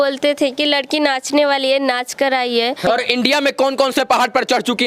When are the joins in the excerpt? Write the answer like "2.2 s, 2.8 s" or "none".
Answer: 2.9 s